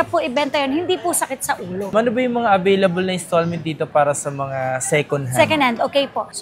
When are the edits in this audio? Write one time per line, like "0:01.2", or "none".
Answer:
0:01.9